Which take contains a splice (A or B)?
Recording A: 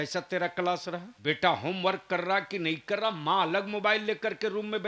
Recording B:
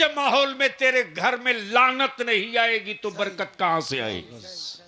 A